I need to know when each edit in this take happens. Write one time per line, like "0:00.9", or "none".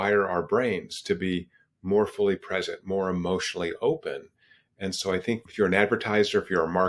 0:05.5

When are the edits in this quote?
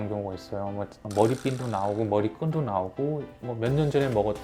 none

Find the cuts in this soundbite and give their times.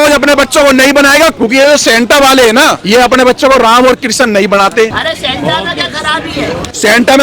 0:01.3
0:02.8
0:05.1

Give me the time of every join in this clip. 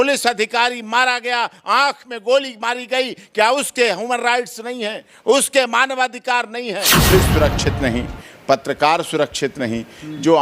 0:07.1

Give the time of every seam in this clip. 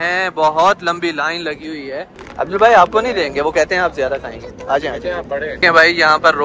0:02.2
0:05.5

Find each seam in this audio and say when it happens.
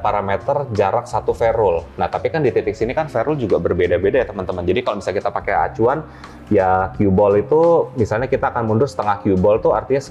none

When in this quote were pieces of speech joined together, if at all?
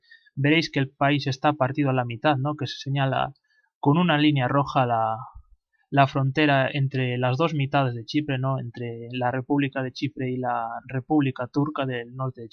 none

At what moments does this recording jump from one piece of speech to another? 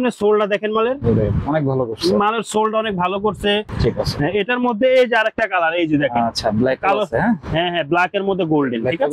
0:03.7

